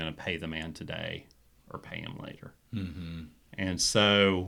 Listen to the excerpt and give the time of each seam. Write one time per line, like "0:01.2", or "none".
none